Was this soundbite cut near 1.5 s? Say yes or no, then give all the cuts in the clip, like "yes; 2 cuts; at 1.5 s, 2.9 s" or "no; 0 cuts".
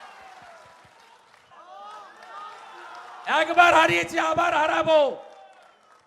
yes; 1 cut; at 1.5 s